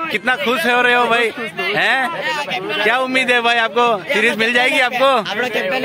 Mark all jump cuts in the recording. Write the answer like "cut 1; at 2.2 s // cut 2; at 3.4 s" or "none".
none

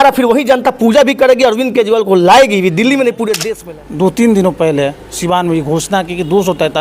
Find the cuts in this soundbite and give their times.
cut 1; at 3.5 s

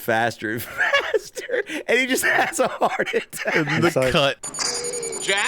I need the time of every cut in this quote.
cut 1; at 4.4 s

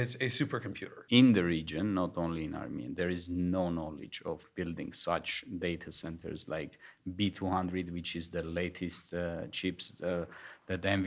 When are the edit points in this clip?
cut 1; at 1.0 s

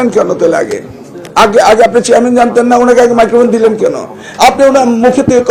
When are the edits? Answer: none

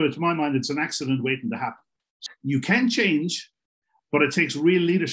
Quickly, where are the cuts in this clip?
cut 1; at 2.1 s

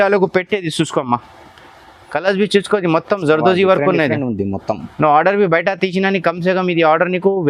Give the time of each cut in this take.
none

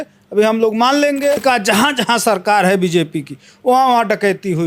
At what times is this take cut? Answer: cut 1; at 1.4 s

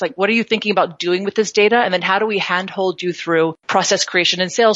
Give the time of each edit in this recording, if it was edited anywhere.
cut 1; at 3.6 s

